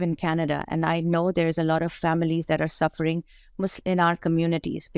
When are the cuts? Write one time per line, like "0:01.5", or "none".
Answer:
none